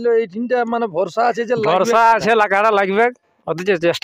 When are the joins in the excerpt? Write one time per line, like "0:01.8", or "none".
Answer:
none